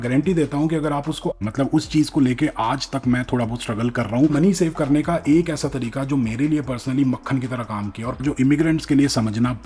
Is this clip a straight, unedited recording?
no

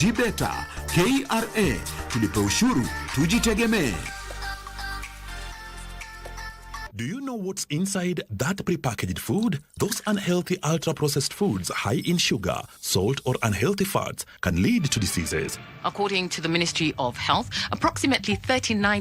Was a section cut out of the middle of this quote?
yes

